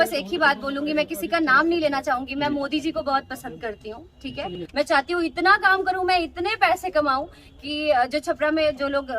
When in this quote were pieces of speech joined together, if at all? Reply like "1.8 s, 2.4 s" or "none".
4.6 s